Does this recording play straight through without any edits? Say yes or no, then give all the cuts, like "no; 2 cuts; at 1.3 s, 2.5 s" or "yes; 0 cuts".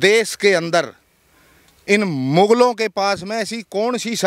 yes; 0 cuts